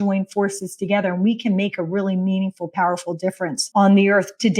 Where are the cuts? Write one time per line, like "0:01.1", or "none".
0:03.6